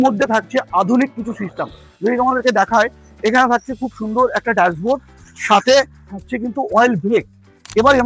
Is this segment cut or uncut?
uncut